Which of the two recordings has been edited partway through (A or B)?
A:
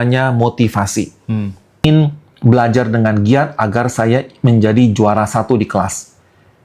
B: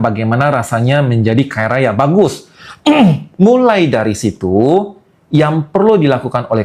A